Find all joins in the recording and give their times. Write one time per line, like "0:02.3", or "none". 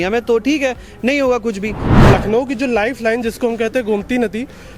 0:01.9